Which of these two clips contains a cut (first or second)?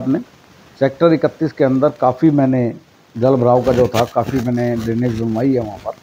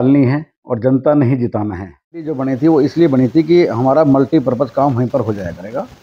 second